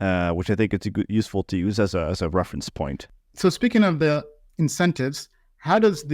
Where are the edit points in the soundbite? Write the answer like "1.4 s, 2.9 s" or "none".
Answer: 3.0 s